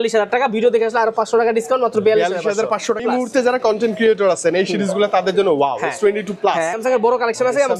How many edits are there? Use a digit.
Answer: 2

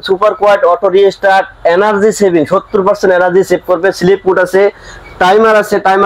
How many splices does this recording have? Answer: 0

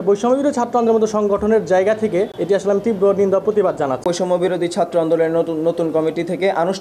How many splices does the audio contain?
2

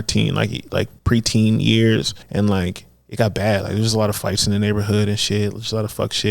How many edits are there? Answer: 2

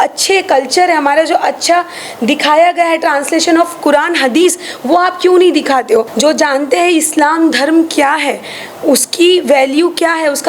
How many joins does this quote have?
1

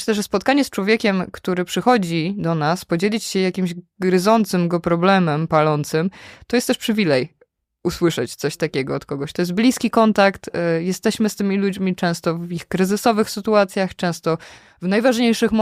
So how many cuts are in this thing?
0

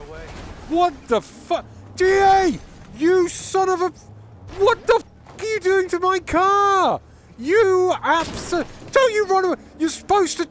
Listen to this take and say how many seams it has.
0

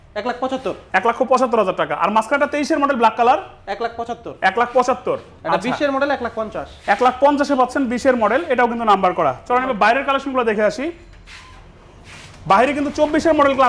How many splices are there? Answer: 0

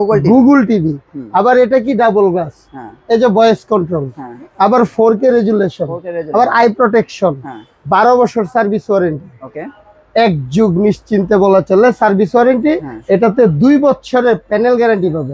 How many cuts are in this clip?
0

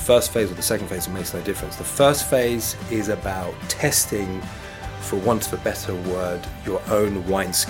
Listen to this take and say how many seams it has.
0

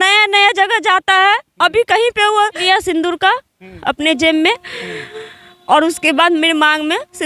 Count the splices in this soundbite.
1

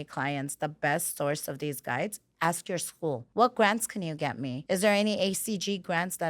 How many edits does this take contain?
2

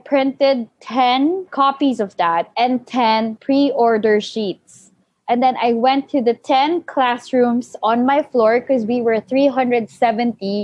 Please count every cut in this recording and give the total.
3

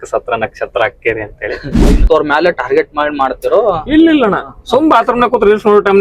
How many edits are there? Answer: 1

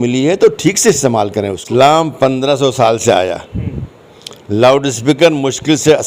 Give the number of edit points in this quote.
1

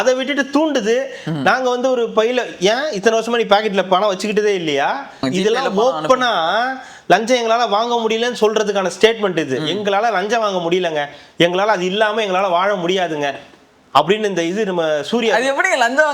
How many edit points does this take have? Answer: 1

